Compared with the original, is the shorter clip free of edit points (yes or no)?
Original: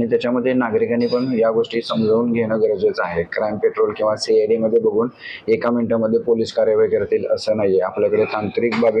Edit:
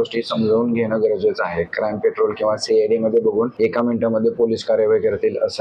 no